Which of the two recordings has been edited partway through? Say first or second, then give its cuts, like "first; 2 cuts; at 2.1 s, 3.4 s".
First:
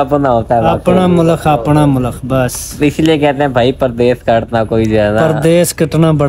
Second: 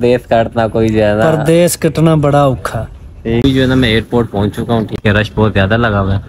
second; 2 cuts; at 3.4 s, 5.0 s